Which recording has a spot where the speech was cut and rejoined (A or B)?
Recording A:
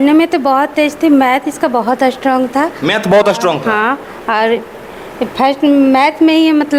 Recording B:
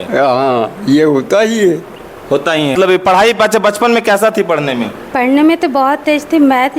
B